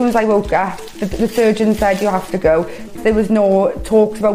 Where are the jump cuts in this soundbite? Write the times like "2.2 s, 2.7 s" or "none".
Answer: 2.9 s